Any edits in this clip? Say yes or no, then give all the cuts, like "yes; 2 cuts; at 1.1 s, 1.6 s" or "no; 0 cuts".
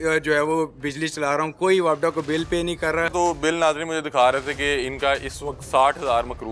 yes; 1 cut; at 3.1 s